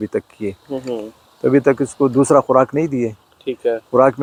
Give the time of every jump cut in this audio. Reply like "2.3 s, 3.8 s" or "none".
none